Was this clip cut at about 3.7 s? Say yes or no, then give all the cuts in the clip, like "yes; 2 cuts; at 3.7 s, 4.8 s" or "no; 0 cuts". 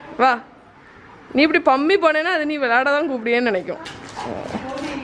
yes; 1 cut; at 3.7 s